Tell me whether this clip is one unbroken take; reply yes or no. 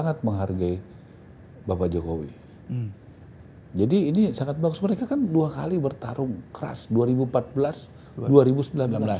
yes